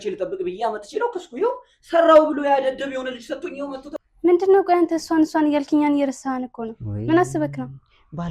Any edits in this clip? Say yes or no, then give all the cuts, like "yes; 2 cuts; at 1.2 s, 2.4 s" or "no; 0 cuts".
yes; 1 cut; at 3.9 s